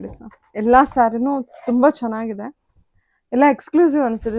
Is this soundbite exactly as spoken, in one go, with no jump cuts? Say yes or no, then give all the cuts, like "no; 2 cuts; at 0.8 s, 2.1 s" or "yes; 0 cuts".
yes; 0 cuts